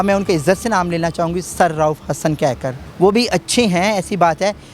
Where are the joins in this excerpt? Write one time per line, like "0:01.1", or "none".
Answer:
0:02.8